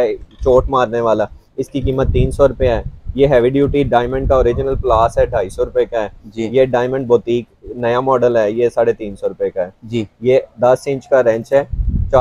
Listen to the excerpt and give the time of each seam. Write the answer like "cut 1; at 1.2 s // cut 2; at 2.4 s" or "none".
none